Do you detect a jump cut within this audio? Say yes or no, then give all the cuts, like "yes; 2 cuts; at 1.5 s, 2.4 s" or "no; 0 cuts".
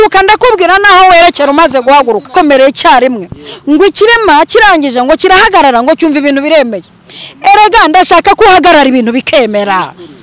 yes; 1 cut; at 2.3 s